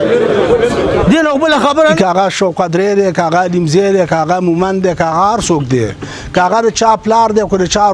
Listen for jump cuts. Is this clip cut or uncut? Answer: cut